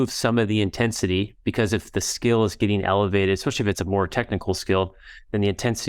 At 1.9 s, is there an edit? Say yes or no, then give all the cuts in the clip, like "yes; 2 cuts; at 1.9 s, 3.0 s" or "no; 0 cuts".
no; 0 cuts